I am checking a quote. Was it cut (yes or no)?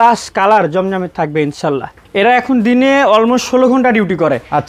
yes